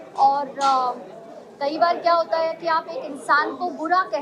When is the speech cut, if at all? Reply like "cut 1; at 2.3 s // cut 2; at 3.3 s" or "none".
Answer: none

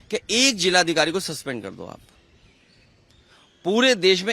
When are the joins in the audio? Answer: none

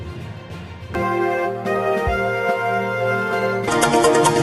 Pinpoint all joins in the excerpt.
cut 1; at 0.9 s // cut 2; at 3.7 s

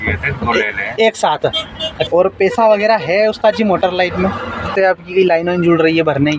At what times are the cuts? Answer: cut 1; at 2.0 s // cut 2; at 4.7 s

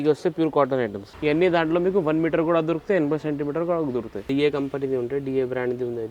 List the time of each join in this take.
cut 1; at 1.0 s // cut 2; at 4.2 s

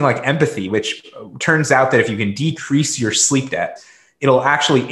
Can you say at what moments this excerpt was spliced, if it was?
cut 1; at 3.7 s

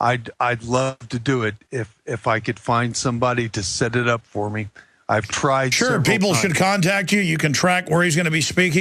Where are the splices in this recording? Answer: cut 1; at 5.5 s

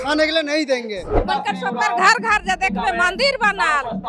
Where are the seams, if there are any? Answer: cut 1; at 1.1 s

